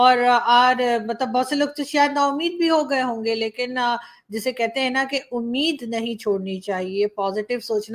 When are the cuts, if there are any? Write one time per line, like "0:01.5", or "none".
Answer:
none